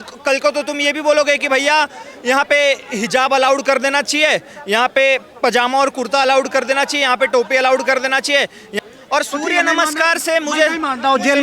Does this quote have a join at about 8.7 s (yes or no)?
yes